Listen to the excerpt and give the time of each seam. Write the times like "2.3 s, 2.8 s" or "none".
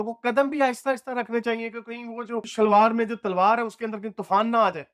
none